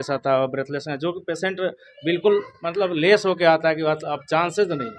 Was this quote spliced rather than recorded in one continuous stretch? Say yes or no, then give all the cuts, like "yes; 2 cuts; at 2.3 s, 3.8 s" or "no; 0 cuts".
no; 0 cuts